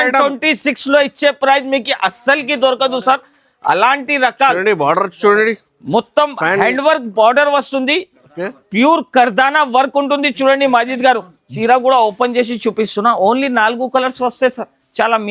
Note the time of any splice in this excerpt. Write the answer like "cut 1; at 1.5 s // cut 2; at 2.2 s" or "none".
cut 1; at 11.5 s

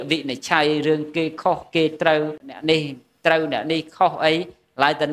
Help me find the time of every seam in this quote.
cut 1; at 2.5 s

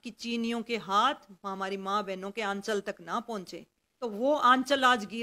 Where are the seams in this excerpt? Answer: cut 1; at 4.0 s

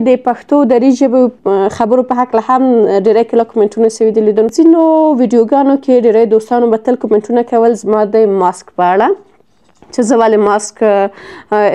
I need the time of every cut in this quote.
cut 1; at 4.5 s

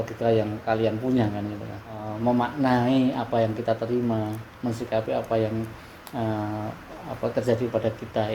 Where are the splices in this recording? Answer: cut 1; at 2.1 s

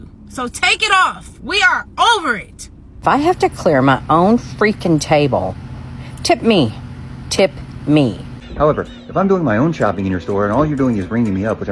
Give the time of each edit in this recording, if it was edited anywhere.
cut 1; at 3.0 s // cut 2; at 8.4 s

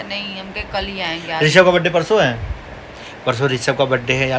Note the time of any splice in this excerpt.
none

